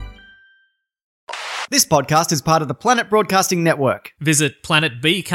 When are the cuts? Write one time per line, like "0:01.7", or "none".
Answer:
0:01.3